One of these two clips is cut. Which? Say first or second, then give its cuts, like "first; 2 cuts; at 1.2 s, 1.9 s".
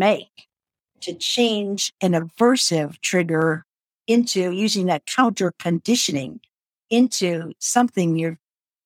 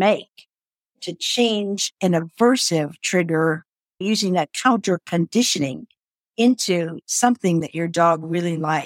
second; 2 cuts; at 4.0 s, 7.6 s